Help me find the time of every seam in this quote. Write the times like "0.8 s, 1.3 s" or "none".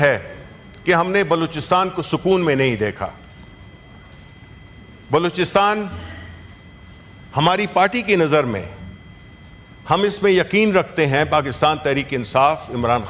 none